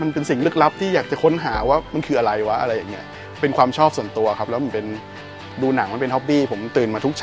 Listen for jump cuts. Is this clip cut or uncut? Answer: uncut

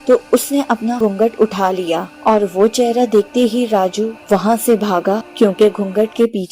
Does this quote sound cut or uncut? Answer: cut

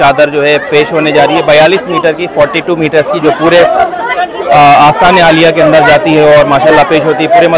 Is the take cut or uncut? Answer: uncut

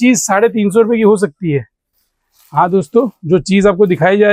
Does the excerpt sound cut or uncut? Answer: uncut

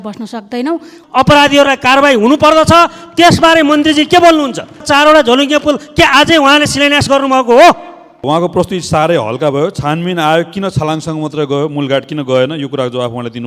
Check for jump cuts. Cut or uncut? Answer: cut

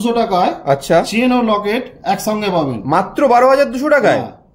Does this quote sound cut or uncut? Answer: uncut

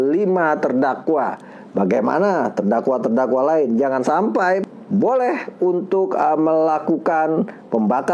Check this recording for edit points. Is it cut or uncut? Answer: cut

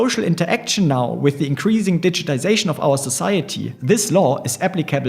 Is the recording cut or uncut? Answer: cut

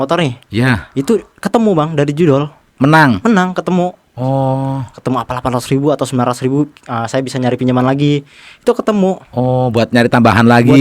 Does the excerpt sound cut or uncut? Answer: uncut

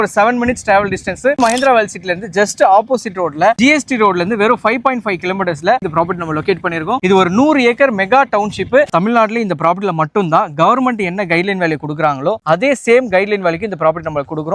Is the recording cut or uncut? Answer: cut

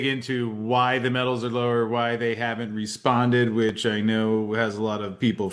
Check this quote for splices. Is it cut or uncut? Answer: uncut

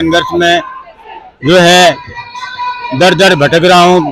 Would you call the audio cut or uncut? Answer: uncut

